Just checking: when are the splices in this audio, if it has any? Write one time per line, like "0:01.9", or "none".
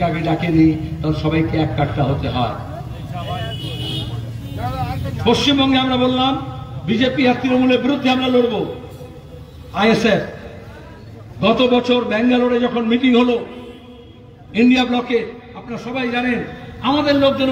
none